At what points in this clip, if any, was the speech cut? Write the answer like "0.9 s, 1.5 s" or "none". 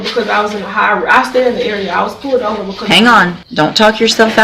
3.4 s